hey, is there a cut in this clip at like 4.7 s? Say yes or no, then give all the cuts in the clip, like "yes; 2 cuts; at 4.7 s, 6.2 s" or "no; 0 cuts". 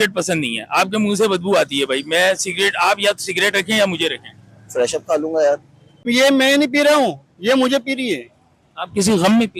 no; 1 cut; at 6.0 s